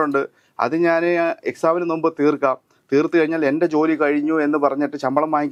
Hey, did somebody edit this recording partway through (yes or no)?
no